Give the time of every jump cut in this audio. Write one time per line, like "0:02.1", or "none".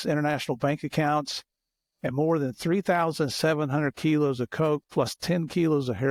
none

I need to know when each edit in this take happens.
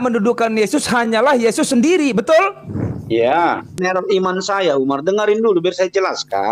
0:03.8

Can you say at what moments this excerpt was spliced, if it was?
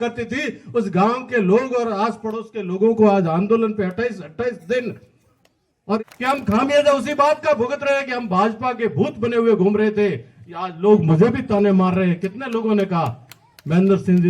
0:06.0

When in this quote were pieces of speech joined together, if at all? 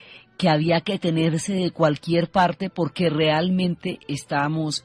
0:01.4

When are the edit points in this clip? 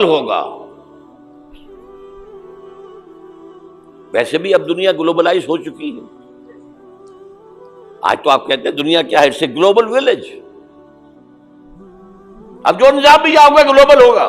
none

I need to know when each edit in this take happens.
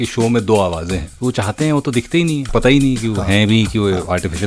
0:01.1
0:02.4

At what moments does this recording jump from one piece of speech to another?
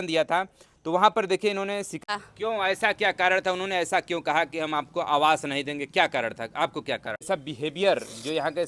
0:02.0
0:07.2

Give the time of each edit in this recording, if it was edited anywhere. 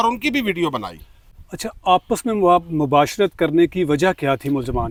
none

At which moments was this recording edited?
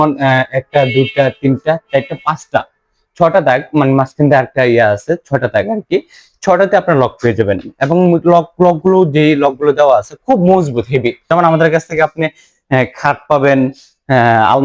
0:11.3

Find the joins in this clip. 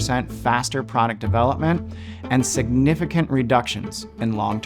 none

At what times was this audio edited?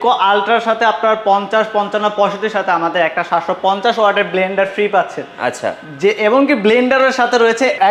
none

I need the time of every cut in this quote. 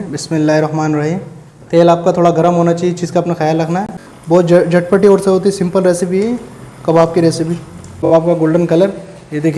0:03.9
0:08.1

